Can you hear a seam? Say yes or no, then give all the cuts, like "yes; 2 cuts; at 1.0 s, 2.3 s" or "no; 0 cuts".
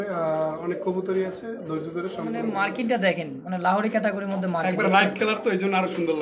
yes; 1 cut; at 2.4 s